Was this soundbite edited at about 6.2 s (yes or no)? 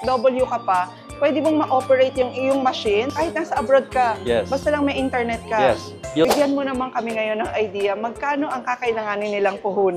yes